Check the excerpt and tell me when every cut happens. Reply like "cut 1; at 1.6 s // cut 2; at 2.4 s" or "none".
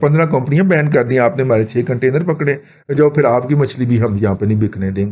none